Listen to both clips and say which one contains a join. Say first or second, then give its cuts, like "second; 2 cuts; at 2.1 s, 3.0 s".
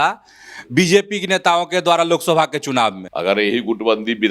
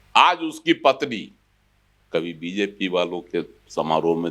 first; 1 cut; at 3.1 s